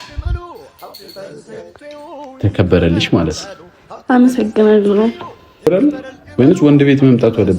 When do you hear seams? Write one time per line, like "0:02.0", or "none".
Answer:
0:05.7

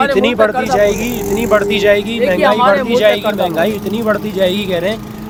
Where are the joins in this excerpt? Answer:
none

